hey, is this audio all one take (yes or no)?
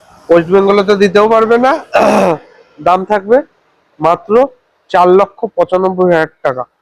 yes